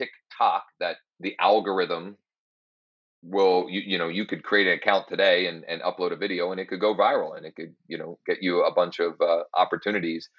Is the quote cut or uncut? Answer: cut